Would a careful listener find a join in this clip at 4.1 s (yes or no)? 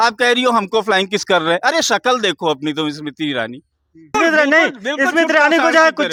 no